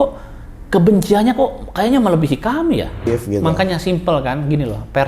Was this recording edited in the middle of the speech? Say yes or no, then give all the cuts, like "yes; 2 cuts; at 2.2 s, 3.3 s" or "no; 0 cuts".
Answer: yes; 1 cut; at 3.1 s